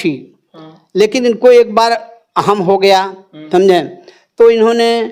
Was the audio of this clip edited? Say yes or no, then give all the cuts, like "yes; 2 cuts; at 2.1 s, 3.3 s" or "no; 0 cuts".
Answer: no; 0 cuts